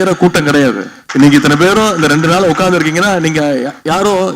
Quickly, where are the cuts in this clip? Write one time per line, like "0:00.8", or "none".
0:00.9